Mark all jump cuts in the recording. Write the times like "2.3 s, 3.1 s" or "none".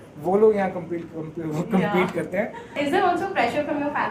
2.8 s